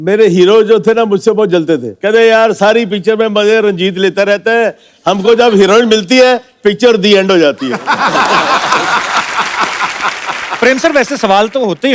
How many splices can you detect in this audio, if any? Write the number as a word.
two